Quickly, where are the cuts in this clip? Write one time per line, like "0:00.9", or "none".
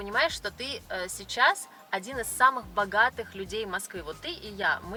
none

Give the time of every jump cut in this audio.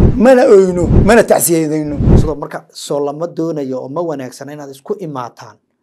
0:00.9
0:02.1

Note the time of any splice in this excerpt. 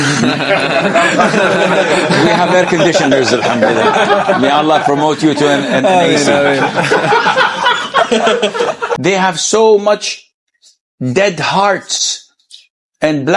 0:08.9

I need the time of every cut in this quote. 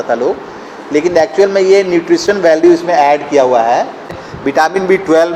0:04.2

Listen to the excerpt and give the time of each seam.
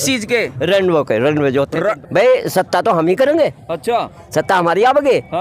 0:02.0

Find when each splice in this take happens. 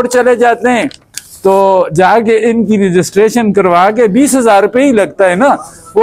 none

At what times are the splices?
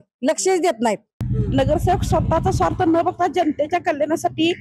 0:01.3

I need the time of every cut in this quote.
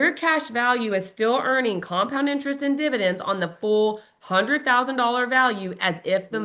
none

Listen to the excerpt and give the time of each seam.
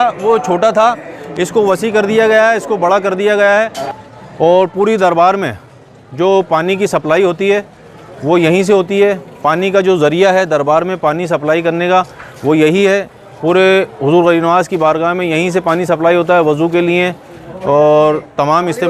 0:03.9

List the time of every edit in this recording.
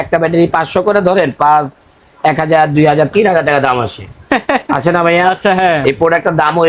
none

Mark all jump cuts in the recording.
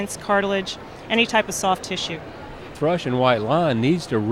0:02.7

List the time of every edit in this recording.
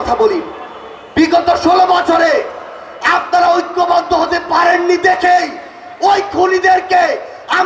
none

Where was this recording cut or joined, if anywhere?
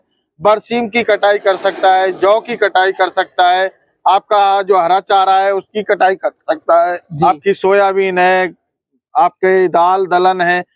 none

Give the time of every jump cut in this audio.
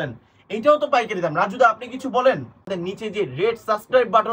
0:02.8

